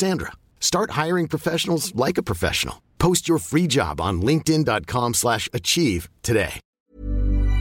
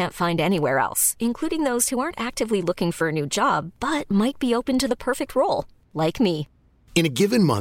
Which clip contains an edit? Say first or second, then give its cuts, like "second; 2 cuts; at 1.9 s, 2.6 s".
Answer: first; 1 cut; at 6.6 s